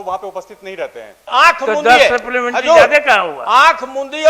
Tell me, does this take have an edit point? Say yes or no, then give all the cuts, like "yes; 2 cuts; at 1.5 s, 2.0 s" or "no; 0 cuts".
yes; 1 cut; at 1.3 s